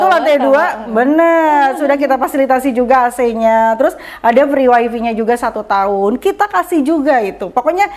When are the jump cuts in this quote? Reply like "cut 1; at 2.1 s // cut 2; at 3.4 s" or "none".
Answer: none